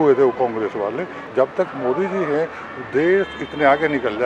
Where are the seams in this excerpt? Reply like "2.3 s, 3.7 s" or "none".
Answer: 1.3 s